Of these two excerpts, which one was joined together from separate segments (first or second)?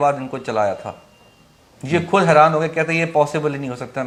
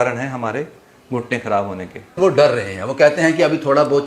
second